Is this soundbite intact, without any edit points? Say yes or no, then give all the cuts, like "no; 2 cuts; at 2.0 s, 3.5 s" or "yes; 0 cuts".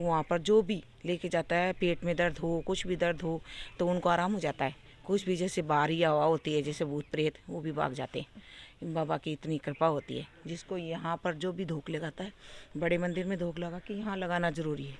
yes; 0 cuts